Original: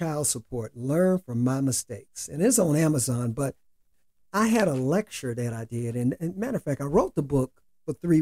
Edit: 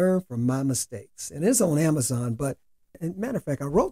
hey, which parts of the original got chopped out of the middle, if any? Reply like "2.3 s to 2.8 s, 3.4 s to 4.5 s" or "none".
4.0 s to 6.2 s

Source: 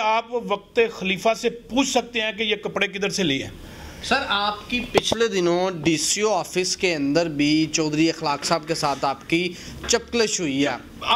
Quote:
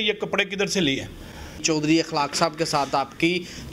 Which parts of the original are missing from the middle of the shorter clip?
4.0 s to 7.7 s

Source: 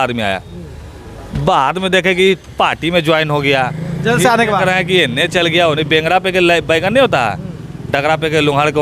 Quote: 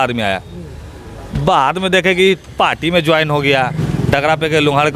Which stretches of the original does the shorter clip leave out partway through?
3.8 s to 7.6 s

